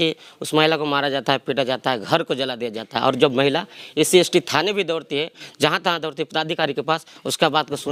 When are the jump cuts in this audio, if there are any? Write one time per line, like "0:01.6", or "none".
none